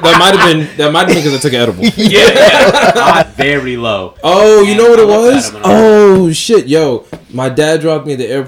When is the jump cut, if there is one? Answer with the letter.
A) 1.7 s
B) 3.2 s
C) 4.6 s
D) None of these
B